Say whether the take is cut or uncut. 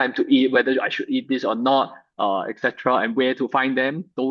uncut